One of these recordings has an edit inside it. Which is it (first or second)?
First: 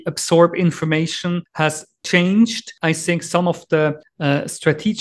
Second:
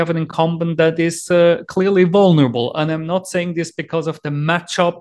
first